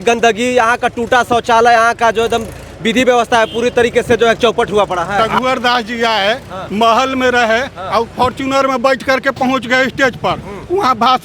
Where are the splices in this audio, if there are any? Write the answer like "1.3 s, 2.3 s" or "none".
5.3 s